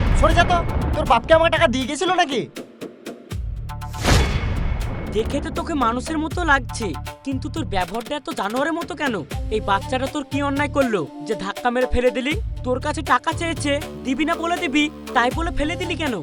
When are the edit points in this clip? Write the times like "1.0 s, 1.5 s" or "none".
none